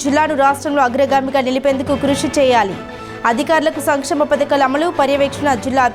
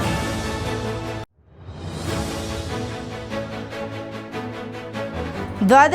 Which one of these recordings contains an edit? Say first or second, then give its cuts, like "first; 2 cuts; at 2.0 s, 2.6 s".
second; 2 cuts; at 1.3 s, 4.4 s